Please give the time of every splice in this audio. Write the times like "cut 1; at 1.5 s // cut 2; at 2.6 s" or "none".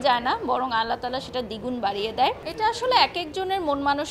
cut 1; at 2.5 s